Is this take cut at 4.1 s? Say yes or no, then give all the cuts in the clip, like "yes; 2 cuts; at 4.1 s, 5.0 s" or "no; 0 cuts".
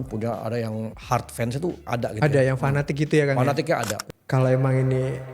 yes; 2 cuts; at 1.0 s, 4.1 s